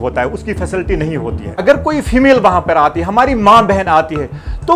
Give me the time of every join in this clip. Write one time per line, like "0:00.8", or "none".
0:01.6